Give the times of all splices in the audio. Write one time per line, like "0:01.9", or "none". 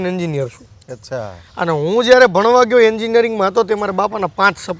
none